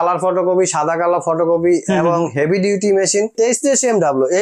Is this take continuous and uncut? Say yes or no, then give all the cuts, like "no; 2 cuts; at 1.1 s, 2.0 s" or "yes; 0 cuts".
no; 1 cut; at 3.3 s